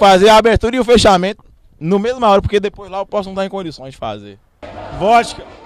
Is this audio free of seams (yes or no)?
no